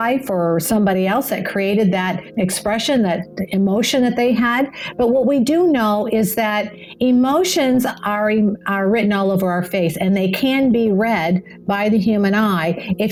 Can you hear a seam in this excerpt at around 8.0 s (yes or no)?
no